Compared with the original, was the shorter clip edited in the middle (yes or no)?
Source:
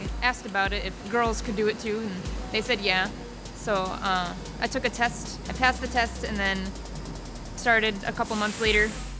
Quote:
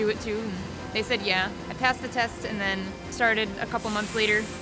yes